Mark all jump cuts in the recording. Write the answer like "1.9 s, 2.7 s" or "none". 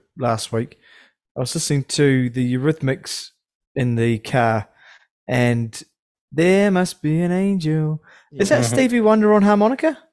none